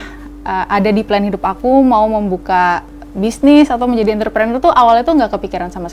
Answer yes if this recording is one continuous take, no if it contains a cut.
yes